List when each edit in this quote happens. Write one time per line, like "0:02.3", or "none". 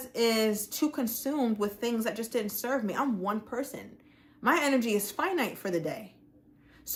none